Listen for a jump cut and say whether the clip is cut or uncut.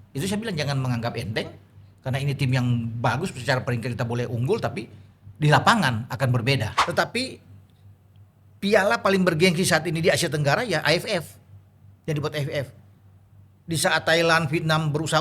cut